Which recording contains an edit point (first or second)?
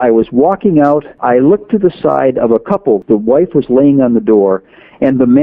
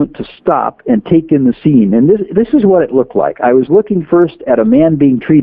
first